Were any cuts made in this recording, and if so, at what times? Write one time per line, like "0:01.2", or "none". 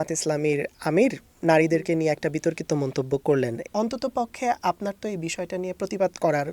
0:03.6